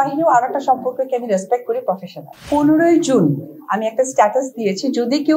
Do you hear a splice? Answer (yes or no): yes